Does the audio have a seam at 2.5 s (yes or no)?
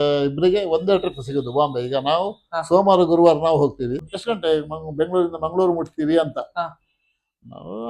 no